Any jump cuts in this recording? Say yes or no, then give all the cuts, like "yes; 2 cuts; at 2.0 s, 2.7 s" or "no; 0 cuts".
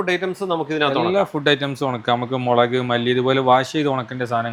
no; 0 cuts